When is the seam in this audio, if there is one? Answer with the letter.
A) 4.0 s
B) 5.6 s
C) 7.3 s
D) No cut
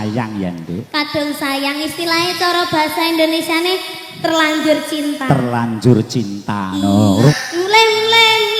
C